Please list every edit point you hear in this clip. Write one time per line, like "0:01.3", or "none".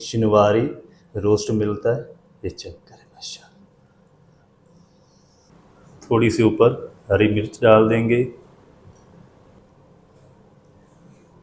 0:05.5
0:09.6